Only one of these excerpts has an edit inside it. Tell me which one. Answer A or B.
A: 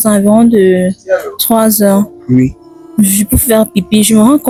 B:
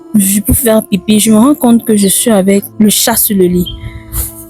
B